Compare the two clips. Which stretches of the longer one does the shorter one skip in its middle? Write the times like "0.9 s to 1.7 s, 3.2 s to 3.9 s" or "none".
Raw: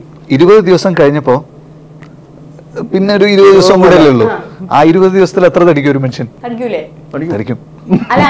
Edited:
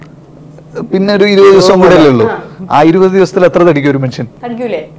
none